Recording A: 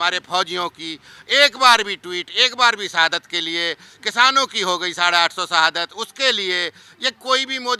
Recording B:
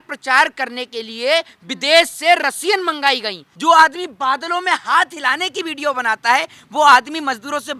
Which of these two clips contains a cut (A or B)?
B